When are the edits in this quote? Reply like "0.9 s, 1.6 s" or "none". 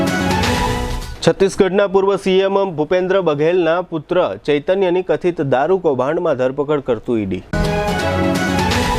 0.9 s